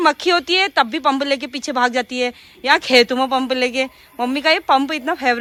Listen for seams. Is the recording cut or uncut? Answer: uncut